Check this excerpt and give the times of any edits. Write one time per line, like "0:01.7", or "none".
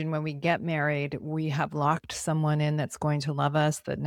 none